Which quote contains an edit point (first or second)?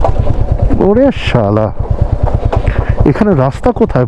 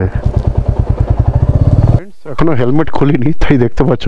second